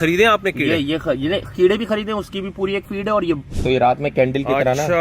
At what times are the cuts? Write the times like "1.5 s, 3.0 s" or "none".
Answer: 3.5 s